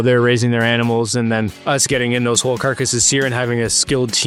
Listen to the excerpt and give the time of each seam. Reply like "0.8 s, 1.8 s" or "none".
none